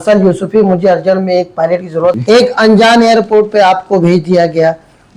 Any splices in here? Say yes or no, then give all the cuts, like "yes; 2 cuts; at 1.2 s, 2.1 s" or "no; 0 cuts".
yes; 1 cut; at 2.2 s